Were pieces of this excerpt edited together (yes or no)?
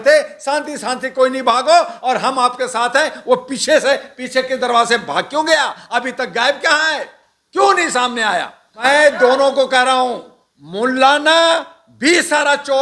yes